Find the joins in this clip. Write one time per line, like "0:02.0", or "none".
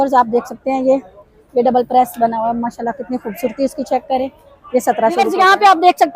0:05.2